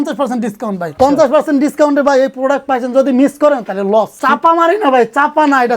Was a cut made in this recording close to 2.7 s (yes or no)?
no